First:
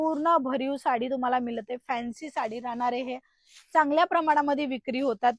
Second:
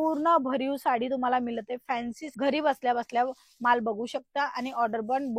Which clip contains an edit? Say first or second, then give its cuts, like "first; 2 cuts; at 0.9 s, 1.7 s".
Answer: second; 1 cut; at 2.2 s